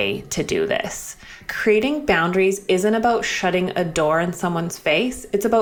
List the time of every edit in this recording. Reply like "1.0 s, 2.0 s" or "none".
1.4 s